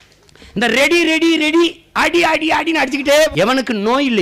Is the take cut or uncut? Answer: cut